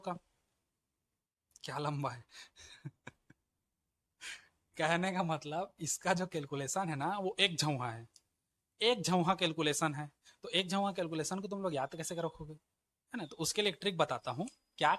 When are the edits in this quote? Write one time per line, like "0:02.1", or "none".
none